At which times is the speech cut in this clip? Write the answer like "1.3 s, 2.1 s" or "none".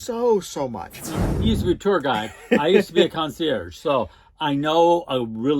1.3 s